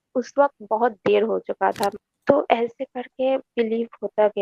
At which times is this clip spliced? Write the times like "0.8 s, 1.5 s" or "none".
1.9 s